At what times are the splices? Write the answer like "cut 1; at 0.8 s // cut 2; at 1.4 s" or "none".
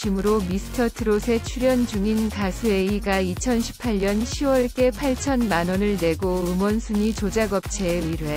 none